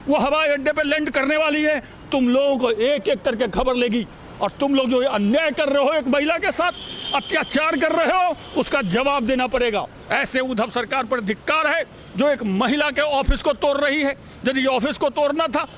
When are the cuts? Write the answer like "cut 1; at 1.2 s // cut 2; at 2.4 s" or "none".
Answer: cut 1; at 10.0 s

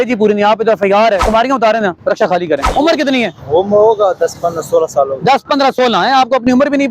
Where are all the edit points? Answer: cut 1; at 1.2 s // cut 2; at 2.7 s

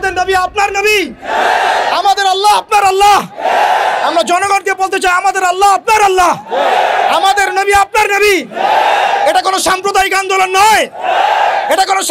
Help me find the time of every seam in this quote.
none

